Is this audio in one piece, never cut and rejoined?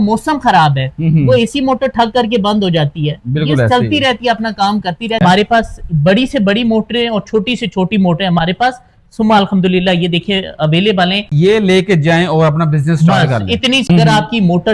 no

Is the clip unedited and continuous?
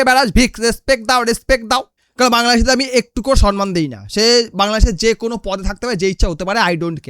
no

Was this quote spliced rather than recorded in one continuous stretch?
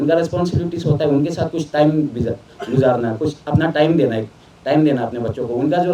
no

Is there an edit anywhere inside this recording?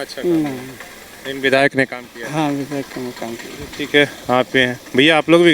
no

